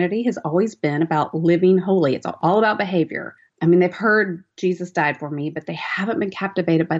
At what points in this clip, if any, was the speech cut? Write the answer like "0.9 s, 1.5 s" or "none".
2.4 s